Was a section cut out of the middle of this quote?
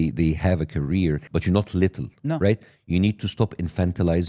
yes; 1 cut; at 1.2 s

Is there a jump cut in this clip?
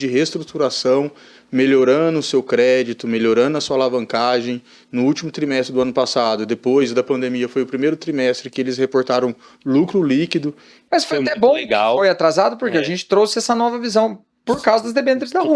yes; 1 cut; at 10.7 s

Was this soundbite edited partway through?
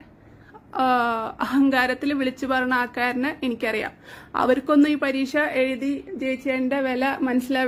no; 0 cuts

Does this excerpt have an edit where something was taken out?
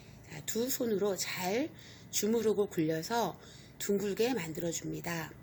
no; 0 cuts

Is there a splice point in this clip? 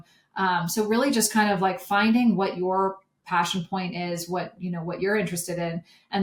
no; 0 cuts

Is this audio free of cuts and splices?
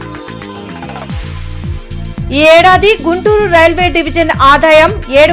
yes; 0 cuts

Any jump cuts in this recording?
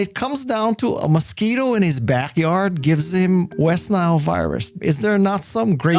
yes; 1 cut; at 4.8 s

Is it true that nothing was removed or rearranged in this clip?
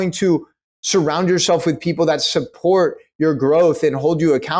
yes; 0 cuts

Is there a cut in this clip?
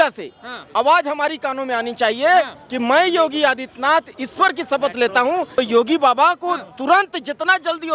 yes; 1 cut; at 5.6 s

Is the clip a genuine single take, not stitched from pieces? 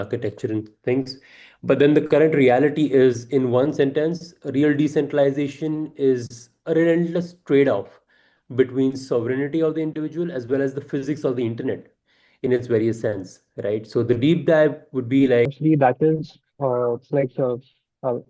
no; 1 cut; at 15.5 s

